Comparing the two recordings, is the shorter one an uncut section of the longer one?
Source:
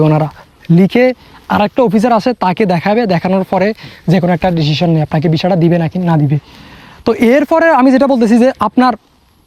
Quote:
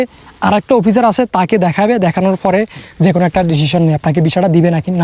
yes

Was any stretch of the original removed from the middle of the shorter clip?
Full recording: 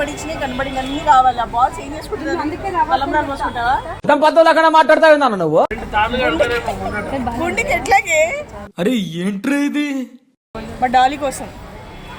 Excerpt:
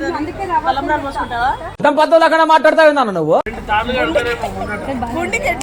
no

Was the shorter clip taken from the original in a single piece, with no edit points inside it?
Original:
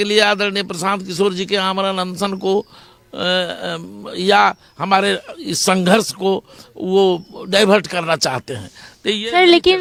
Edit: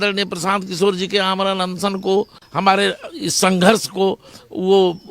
no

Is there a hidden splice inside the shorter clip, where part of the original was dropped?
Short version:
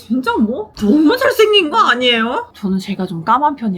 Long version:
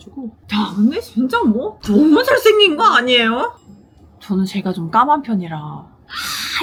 yes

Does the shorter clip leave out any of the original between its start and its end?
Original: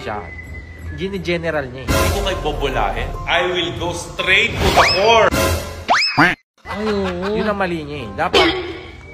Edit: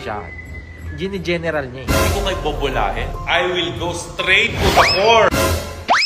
no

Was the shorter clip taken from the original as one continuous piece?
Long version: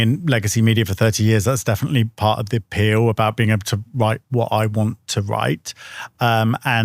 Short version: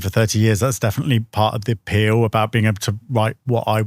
yes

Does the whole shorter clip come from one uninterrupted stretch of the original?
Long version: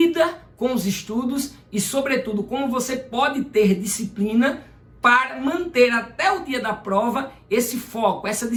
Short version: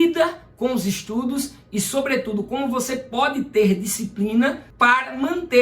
no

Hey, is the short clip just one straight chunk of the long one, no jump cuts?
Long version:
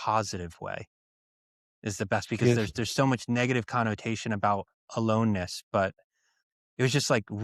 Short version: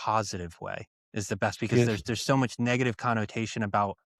no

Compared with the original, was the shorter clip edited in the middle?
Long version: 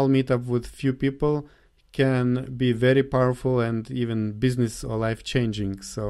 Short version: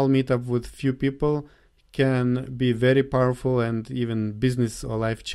no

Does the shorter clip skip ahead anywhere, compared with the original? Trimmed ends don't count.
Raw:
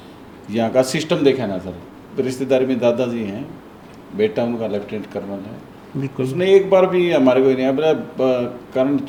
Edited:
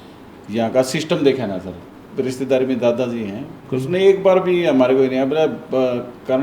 yes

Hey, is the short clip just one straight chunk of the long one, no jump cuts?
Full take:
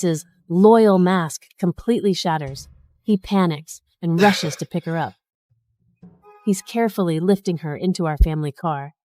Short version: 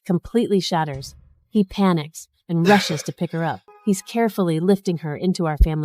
no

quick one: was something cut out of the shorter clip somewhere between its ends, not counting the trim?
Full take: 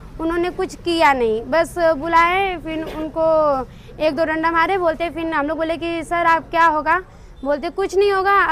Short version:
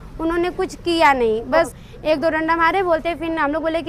yes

